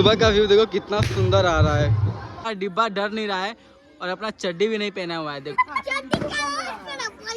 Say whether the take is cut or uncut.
cut